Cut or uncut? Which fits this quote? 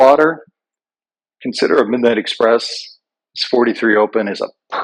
uncut